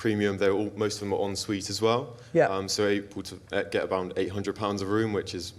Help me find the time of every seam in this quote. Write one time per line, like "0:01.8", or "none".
none